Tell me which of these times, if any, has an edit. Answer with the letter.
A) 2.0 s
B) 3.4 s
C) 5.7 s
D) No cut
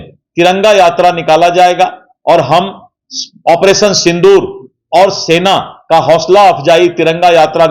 D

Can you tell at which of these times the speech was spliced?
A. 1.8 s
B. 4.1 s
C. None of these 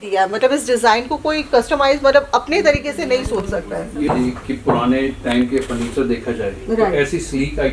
B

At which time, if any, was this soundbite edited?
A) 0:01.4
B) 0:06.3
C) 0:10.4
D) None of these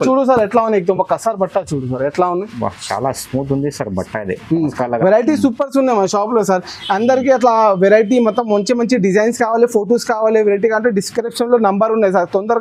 D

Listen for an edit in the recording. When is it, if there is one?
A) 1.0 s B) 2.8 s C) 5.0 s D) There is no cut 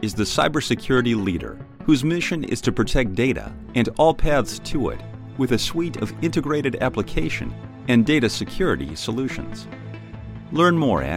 D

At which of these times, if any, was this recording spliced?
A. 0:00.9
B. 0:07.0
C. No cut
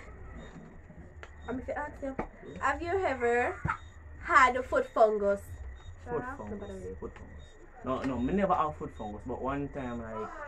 A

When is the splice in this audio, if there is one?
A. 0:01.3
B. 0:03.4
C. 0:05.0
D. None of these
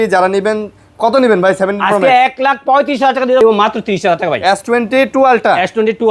B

